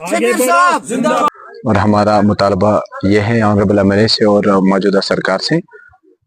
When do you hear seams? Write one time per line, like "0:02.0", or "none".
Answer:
0:01.3

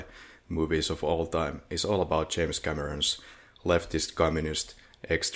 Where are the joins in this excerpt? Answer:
none

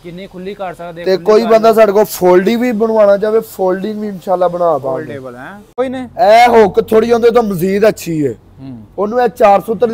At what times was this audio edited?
0:05.8

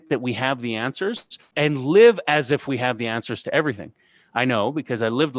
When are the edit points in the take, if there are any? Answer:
0:01.5

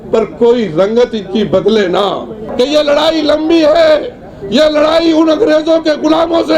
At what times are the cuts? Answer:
0:02.4

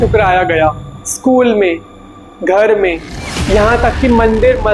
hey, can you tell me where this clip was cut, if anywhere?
none

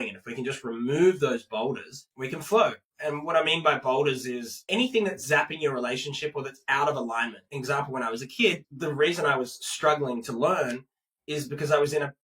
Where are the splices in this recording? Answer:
0:04.6
0:07.4
0:08.7

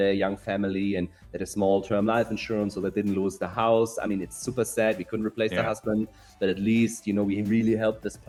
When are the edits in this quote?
none

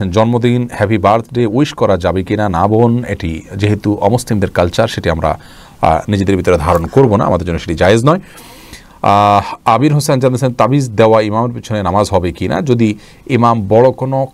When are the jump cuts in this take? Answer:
none

